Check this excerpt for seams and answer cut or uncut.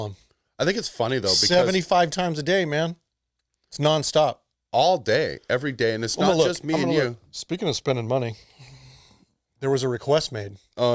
cut